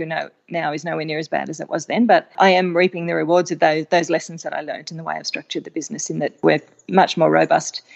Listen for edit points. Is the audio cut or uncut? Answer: cut